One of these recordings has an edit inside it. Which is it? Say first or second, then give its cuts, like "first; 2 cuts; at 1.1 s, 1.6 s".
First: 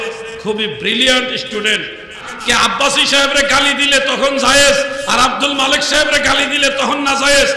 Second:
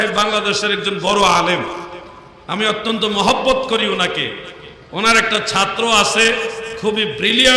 first; 1 cut; at 2.3 s